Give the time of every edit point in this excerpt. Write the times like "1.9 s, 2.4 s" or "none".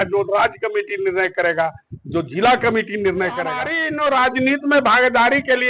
3.8 s

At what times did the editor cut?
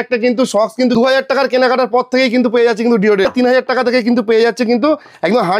1.0 s, 3.3 s

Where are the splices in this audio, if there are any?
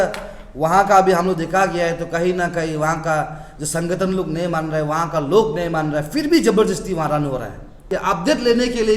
7.8 s

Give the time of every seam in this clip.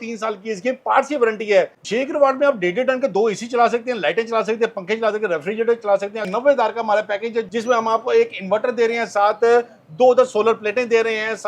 1.8 s, 6.2 s, 7.5 s

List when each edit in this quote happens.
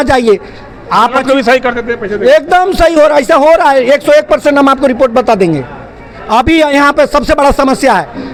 none

